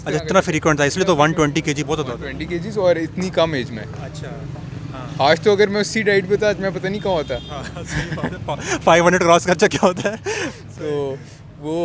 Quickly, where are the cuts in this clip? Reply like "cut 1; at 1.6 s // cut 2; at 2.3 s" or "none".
none